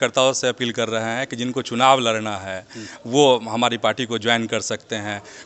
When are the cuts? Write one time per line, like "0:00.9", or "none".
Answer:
none

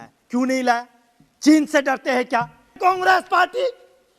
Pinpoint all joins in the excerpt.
0:02.8

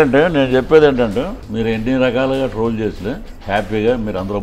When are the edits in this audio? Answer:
0:01.4
0:03.3

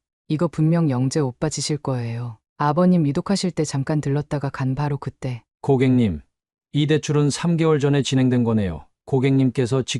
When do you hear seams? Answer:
0:05.4

